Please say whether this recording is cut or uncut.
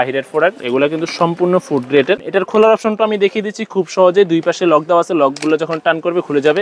cut